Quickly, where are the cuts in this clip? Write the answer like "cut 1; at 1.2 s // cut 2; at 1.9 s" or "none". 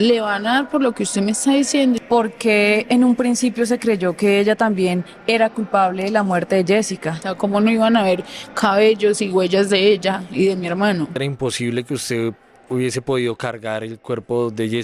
cut 1; at 2.0 s // cut 2; at 7.2 s // cut 3; at 11.1 s